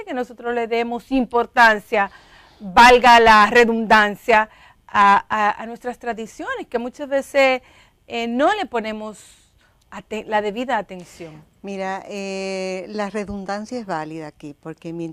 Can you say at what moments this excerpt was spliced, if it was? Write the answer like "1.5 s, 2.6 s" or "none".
13.0 s